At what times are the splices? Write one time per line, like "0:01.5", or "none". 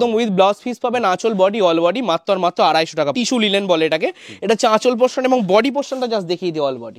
0:03.1